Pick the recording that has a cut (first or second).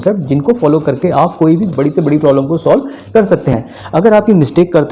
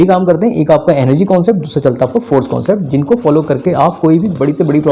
first